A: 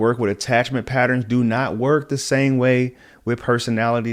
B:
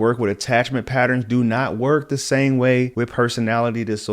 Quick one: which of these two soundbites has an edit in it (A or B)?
B